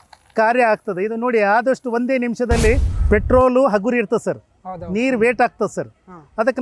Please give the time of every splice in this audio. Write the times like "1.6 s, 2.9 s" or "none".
2.9 s